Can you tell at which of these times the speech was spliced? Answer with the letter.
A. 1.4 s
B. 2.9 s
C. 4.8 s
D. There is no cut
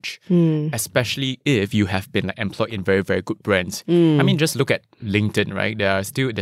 A